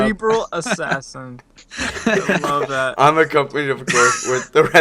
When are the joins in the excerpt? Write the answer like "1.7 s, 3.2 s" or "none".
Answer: none